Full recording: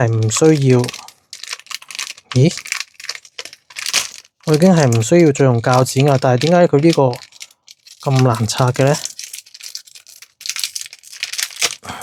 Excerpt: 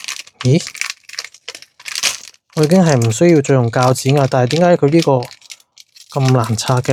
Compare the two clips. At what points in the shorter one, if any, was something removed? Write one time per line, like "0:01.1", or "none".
none